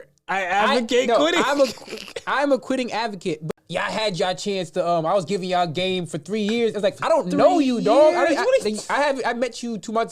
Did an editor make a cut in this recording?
yes; 1 cut; at 3.5 s

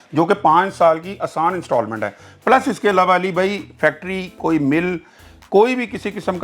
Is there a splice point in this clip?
no; 0 cuts

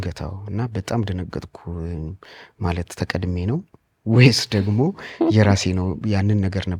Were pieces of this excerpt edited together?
no; 0 cuts

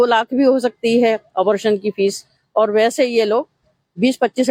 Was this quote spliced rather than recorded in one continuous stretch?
no; 0 cuts

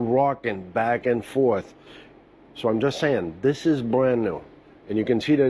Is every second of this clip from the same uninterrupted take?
no; 1 cut; at 1.9 s

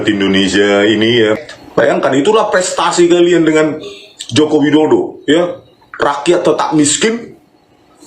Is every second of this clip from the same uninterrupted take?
no; 1 cut; at 1.5 s

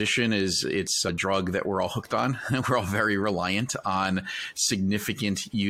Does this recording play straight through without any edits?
no; 1 cut; at 1.1 s

